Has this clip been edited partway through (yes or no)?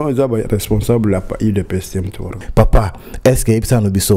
yes